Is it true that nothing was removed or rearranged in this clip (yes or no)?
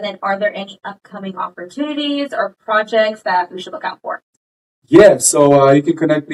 yes